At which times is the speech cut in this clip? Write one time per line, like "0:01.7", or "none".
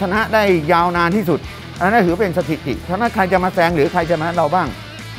0:02.9

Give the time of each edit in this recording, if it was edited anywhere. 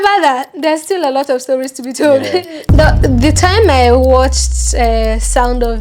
0:02.6

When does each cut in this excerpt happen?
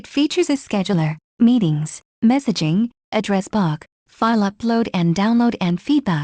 0:01.2

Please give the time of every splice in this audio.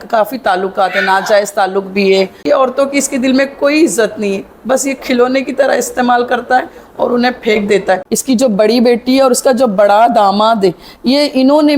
0:02.4
0:08.1

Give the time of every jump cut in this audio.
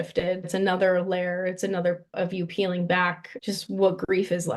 0:02.1
0:03.3

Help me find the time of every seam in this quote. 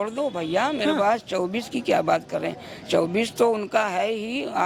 none

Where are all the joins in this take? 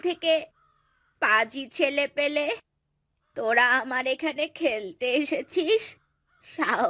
none

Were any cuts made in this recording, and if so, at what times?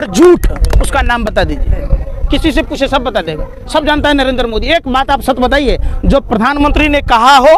none

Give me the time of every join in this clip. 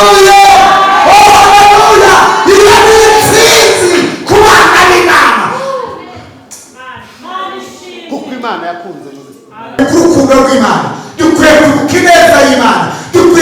0:09.8

